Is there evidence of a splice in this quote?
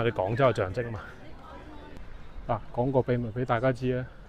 yes; 1 cut; at 2.0 s

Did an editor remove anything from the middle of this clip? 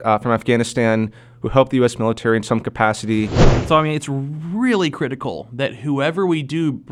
yes; 1 cut; at 3.5 s

